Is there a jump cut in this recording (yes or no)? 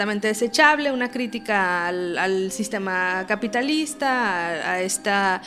no